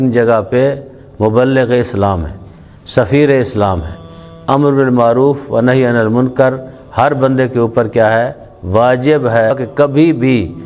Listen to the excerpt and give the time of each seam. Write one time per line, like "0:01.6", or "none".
0:09.5